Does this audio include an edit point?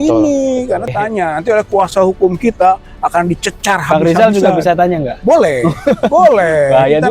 yes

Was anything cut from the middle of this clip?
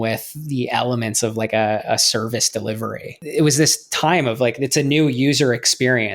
yes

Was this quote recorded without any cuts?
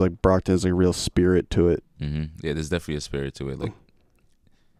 yes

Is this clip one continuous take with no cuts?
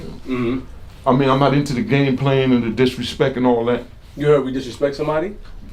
yes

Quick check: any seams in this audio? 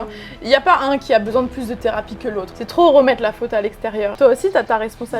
yes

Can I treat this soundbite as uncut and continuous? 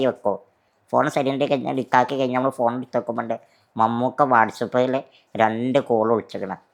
yes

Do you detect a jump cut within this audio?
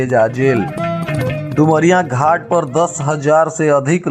no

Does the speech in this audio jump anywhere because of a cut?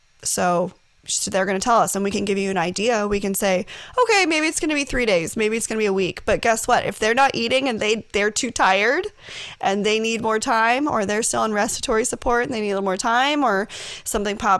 no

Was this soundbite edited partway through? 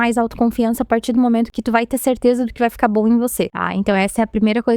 yes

